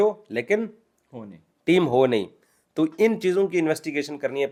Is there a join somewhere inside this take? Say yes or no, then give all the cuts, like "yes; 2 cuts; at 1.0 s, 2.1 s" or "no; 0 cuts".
no; 0 cuts